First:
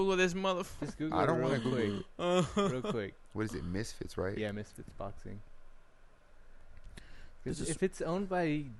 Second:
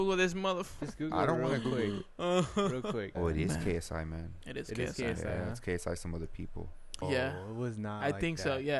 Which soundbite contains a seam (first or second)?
second